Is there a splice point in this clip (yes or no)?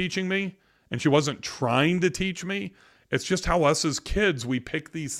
no